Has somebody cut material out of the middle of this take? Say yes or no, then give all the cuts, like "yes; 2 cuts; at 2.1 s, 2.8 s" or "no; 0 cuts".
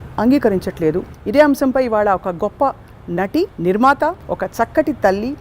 yes; 3 cuts; at 1.1 s, 3.5 s, 4.2 s